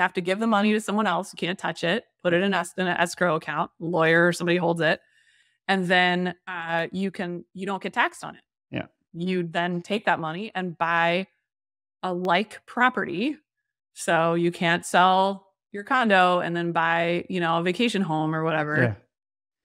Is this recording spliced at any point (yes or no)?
no